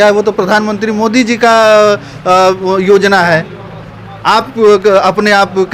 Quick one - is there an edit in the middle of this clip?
no; 0 cuts

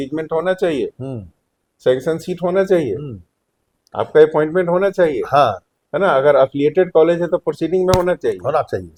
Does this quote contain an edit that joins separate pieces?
no; 0 cuts

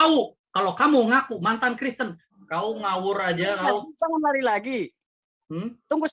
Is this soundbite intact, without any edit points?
no; 1 cut; at 2.2 s

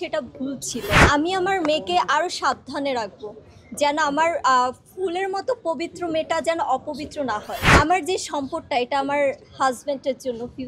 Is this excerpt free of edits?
no; 2 cuts; at 1.0 s, 7.6 s

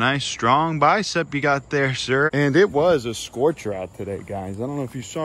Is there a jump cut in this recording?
yes; 1 cut; at 2.3 s

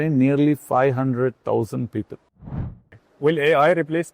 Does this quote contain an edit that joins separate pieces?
yes; 1 cut; at 2.5 s

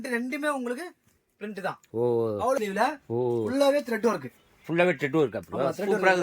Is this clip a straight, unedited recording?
no; 1 cut; at 2.6 s

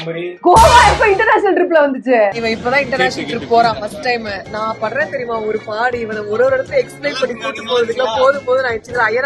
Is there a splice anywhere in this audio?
yes; 1 cut; at 2.4 s

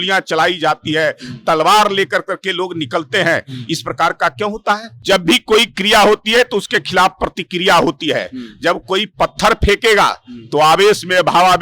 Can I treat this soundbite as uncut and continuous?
no; 1 cut; at 4.9 s

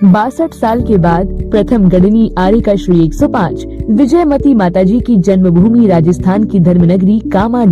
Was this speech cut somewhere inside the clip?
yes; 1 cut; at 3.5 s

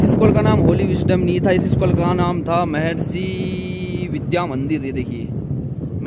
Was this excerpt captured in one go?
yes; 0 cuts

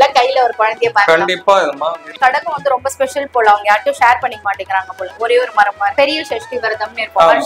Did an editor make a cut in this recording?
yes; 2 cuts; at 2.1 s, 5.9 s

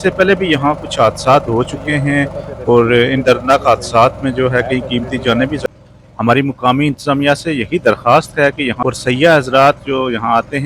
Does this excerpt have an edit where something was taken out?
yes; 2 cuts; at 5.6 s, 8.8 s

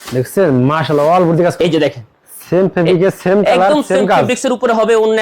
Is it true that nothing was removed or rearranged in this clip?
no; 1 cut; at 1.6 s

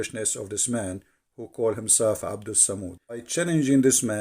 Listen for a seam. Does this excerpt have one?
yes; 1 cut; at 3.3 s

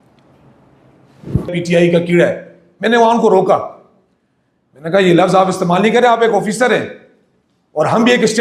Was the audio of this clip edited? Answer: yes; 1 cut; at 1.5 s

